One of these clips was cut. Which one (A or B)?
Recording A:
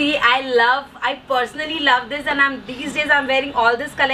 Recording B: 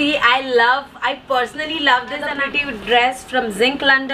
B